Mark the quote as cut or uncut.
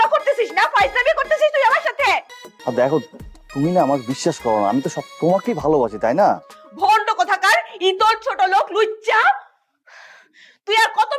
uncut